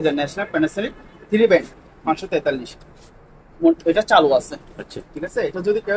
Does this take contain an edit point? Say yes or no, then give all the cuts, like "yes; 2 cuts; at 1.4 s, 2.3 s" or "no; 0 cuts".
no; 0 cuts